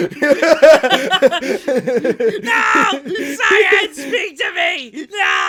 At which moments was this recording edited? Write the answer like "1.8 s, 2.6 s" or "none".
none